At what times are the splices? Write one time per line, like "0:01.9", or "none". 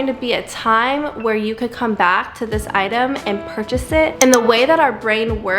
0:04.1